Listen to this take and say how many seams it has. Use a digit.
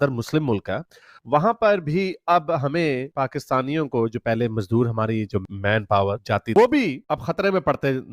1